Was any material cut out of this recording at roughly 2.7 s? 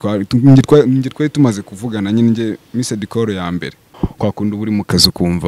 no; 1 cut; at 3.9 s

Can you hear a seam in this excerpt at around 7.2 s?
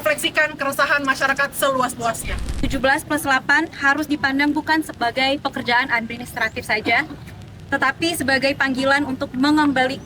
no; 1 cut; at 2.7 s

